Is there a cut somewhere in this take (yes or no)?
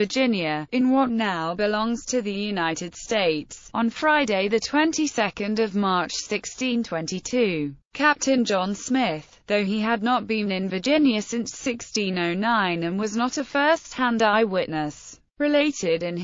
no